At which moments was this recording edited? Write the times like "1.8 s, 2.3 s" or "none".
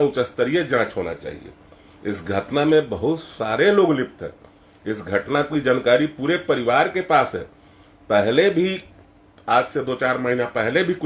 none